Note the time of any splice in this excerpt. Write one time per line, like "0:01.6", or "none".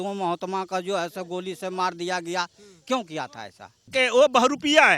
0:03.9